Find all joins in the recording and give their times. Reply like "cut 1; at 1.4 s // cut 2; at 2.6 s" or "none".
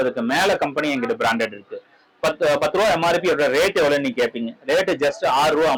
none